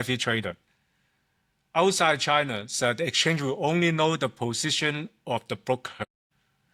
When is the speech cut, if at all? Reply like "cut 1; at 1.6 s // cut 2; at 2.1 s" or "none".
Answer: none